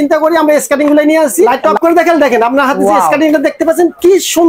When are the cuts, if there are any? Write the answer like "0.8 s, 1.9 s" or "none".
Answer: 1.6 s